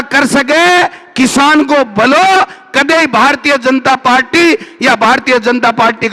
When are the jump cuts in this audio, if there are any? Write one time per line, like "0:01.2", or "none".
none